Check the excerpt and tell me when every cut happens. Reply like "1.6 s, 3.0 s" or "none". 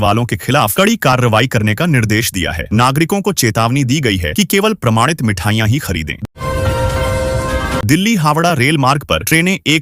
6.3 s, 7.8 s